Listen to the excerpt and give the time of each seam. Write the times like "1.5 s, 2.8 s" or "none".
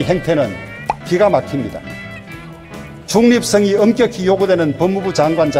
1.1 s